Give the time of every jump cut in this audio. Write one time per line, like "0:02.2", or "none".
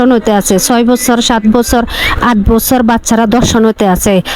none